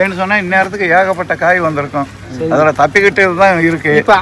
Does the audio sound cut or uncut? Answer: uncut